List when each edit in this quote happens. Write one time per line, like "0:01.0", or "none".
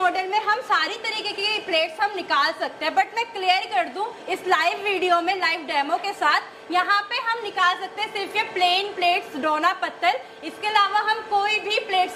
none